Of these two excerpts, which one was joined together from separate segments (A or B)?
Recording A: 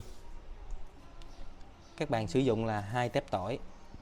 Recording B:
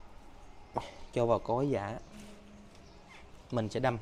A